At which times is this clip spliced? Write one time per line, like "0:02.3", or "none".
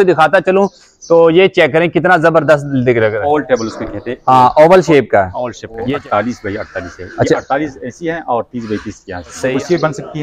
0:03.2
0:05.9
0:09.4